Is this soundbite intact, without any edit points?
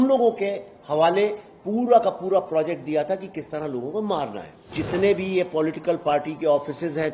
no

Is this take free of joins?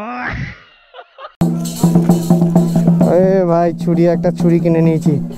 no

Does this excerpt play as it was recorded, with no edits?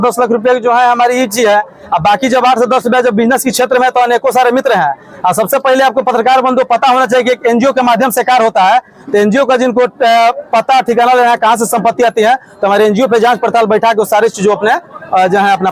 yes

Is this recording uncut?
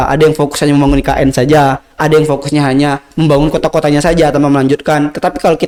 yes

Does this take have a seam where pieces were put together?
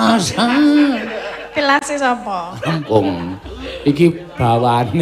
yes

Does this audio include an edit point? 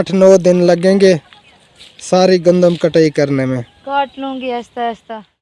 no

